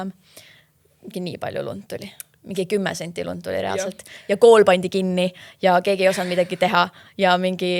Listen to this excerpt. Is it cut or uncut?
uncut